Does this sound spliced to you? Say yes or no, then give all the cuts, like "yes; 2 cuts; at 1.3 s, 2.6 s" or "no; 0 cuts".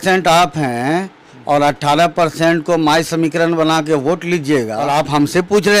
yes; 1 cut; at 4.8 s